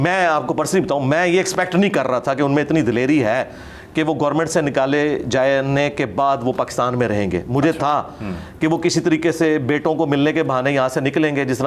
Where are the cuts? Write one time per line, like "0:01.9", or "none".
none